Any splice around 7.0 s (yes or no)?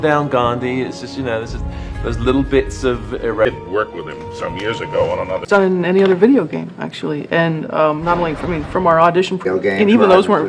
no